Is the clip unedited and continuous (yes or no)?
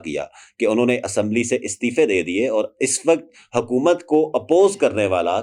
yes